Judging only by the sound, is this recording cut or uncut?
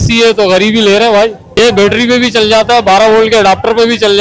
cut